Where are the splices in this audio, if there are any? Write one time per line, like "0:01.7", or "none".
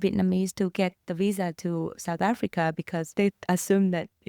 0:03.1